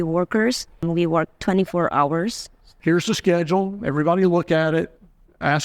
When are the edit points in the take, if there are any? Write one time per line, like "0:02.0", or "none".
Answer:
0:00.8
0:02.7